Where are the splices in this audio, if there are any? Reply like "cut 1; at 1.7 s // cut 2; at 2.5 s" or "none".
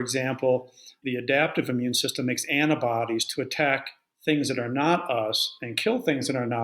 cut 1; at 0.9 s